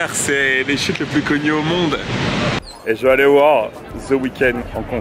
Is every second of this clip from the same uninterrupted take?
no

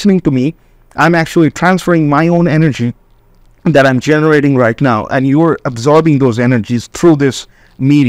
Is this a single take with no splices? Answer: yes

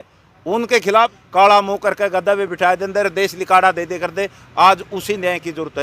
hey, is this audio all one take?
no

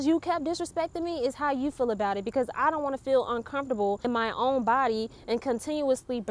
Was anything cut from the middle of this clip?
yes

